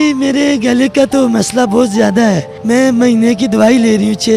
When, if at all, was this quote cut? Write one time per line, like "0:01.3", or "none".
0:02.5